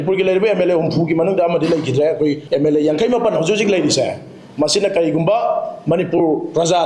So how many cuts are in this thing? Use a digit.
1